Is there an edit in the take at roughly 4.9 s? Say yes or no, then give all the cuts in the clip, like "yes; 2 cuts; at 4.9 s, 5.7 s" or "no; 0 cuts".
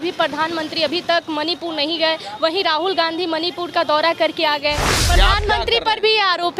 yes; 1 cut; at 4.9 s